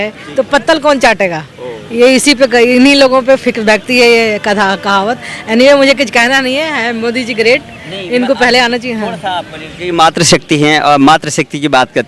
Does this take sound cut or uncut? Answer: uncut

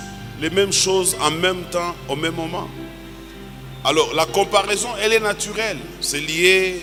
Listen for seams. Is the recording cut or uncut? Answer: uncut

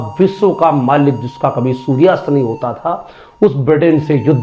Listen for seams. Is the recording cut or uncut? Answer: uncut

